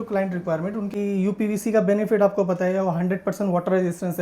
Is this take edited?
yes; 1 cut; at 0.9 s

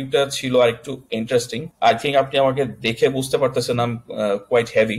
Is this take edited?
yes; 1 cut; at 1.6 s

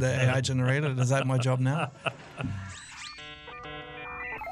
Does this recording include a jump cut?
yes; 1 cut; at 3.4 s

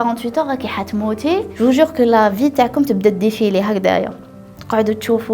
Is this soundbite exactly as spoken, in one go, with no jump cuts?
no; 1 cut; at 1.5 s

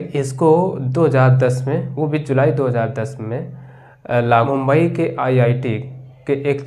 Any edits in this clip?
yes; 1 cut; at 4.5 s

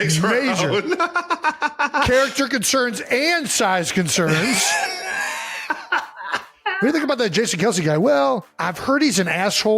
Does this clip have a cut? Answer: yes; 1 cut; at 8.7 s

